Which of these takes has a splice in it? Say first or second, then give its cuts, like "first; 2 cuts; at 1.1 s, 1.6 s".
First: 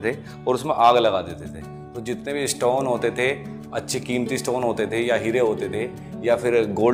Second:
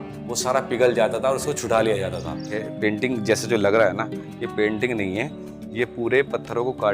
second; 1 cut; at 2.7 s